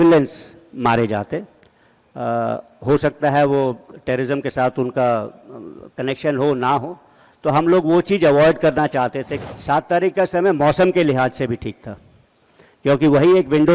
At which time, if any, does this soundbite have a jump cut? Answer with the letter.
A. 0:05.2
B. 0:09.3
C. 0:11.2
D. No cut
B